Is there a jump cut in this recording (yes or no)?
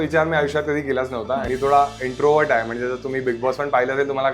yes